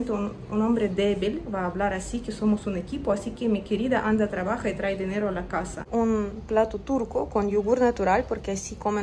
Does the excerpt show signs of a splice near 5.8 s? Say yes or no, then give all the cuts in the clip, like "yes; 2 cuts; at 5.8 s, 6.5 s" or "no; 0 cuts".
yes; 1 cut; at 5.8 s